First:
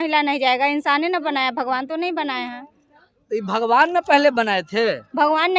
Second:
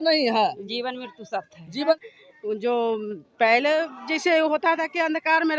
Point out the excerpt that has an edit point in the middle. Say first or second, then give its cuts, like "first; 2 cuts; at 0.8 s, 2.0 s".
second; 1 cut; at 2.0 s